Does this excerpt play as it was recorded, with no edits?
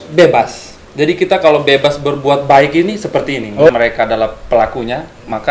no; 1 cut; at 3.7 s

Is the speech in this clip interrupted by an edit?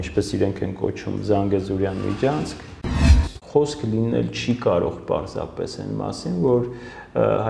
yes; 1 cut; at 3.0 s

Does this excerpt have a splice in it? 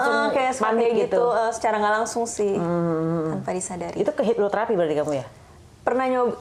no; 0 cuts

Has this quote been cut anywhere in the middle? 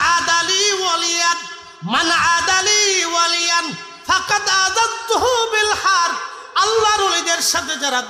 no; 0 cuts

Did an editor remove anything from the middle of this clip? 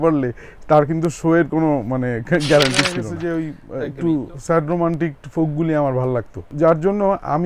yes; 2 cuts; at 3.1 s, 6.4 s

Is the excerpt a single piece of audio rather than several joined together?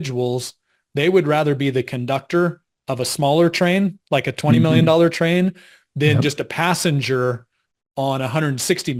yes; 0 cuts

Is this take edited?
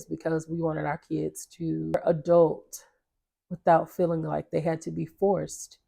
yes; 1 cut; at 1.9 s

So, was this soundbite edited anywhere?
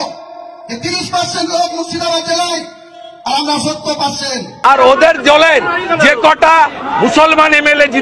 yes; 1 cut; at 4.6 s

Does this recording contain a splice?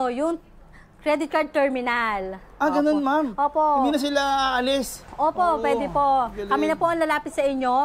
no; 0 cuts

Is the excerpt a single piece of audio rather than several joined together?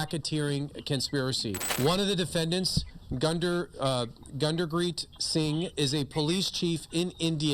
no; 1 cut; at 1.6 s

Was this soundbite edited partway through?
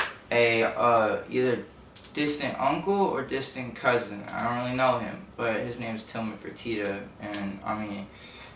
no; 0 cuts

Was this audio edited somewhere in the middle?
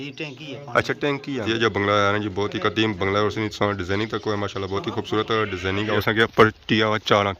yes; 2 cuts; at 1.4 s, 6.0 s

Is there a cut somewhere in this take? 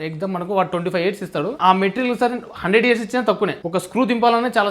yes; 2 cuts; at 1.6 s, 3.6 s

